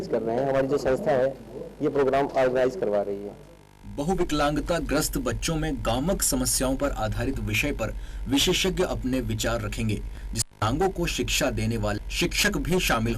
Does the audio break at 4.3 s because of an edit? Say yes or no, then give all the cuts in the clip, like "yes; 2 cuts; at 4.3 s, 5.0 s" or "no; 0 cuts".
no; 1 cut; at 10.4 s